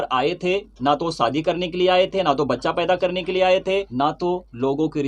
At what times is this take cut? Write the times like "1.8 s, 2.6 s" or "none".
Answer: 3.9 s